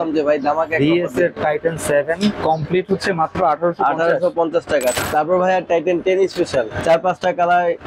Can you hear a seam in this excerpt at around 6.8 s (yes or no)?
yes